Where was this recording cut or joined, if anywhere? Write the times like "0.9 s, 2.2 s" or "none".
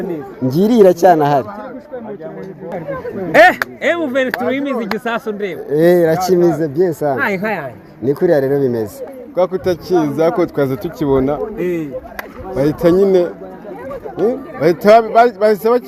2.7 s, 9.1 s